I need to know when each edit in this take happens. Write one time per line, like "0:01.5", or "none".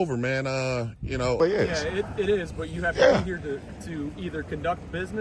0:01.4